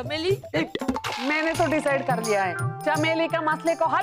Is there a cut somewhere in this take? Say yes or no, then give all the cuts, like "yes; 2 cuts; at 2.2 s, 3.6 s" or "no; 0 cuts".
yes; 2 cuts; at 1.1 s, 2.7 s